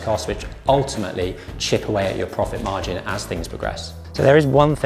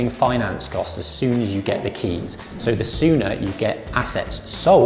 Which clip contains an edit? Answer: first; 1 cut; at 3.9 s

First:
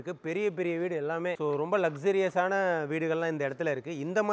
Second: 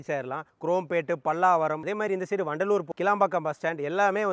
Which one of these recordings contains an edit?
second; 2 cuts; at 1.8 s, 2.9 s

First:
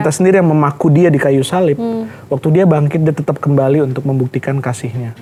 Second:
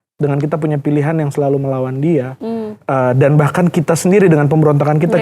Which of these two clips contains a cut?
second; 1 cut; at 2.7 s

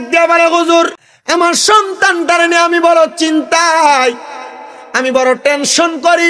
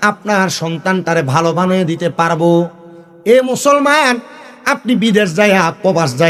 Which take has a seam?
first; 1 cut; at 1.1 s

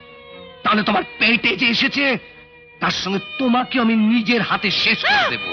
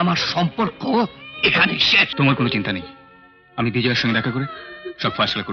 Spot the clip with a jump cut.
second; 1 cut; at 2.1 s

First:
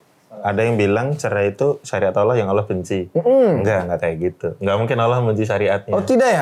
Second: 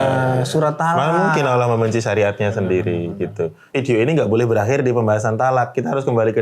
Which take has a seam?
second; 1 cut; at 3.6 s

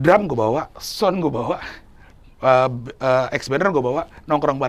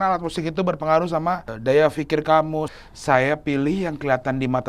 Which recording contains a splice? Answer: second; 2 cuts; at 1.5 s, 2.7 s

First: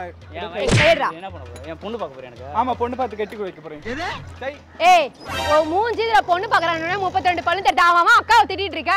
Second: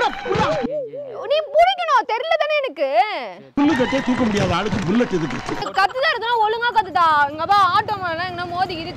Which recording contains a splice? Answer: second; 1 cut; at 5.6 s

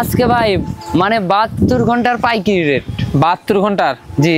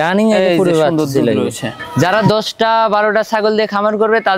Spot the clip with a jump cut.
second; 1 cut; at 1.9 s

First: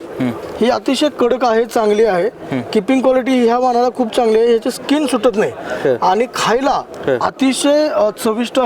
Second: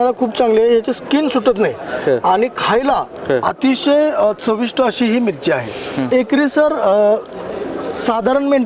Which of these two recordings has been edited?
second; 1 cut; at 6.1 s

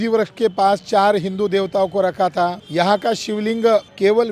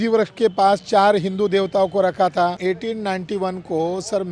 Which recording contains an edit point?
second; 1 cut; at 2.6 s

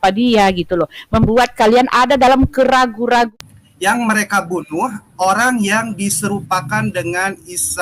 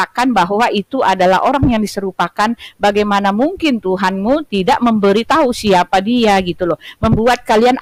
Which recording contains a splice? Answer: first; 1 cut; at 3.3 s

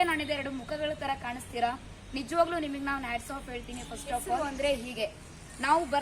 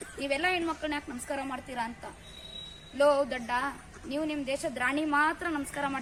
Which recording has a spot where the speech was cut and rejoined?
first; 1 cut; at 4.4 s

